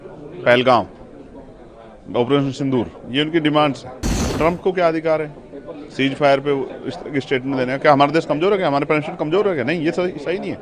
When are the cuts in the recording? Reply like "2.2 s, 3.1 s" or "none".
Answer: 4.2 s